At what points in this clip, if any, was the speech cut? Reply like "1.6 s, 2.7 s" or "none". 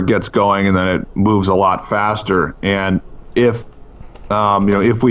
none